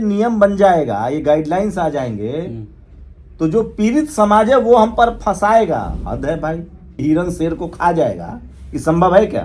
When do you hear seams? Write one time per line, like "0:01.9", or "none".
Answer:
0:07.0